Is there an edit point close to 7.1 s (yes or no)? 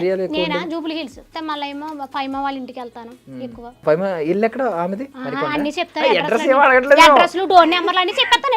no